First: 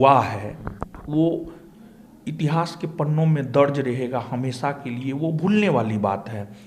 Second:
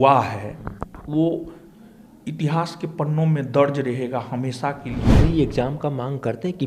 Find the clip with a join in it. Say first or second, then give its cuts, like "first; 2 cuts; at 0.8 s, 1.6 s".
second; 1 cut; at 5.1 s